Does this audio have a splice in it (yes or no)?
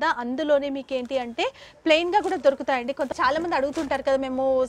yes